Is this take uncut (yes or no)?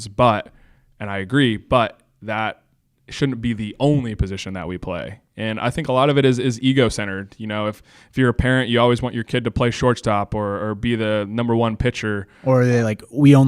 yes